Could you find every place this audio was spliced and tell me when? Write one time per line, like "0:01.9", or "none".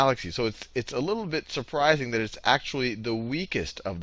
0:03.0